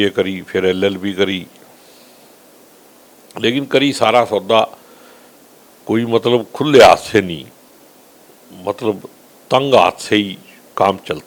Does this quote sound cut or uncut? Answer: uncut